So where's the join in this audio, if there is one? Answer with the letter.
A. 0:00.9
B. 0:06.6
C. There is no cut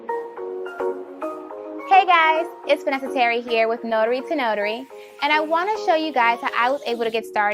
C